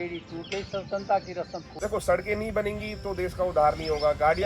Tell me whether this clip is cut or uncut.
cut